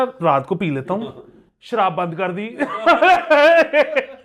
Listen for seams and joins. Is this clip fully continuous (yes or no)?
yes